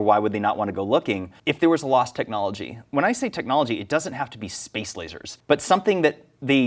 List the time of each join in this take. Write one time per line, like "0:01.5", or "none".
0:01.4
0:02.8
0:05.3